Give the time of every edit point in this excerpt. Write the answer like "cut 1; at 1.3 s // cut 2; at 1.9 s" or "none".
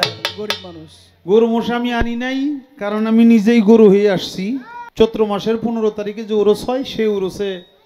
cut 1; at 4.8 s